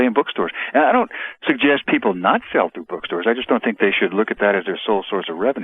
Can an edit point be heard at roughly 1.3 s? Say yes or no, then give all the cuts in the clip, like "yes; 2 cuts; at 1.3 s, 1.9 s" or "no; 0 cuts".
no; 0 cuts